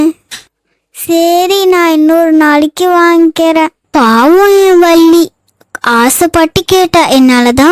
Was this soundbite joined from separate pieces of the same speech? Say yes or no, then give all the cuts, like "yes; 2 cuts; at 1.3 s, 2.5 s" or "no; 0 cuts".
no; 0 cuts